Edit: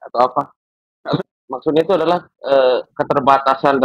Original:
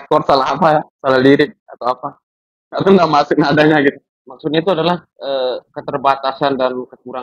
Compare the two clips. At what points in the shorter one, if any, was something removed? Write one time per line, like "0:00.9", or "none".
0:01.2